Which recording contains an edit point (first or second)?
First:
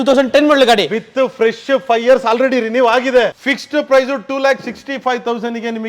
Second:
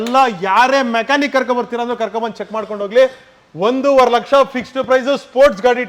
first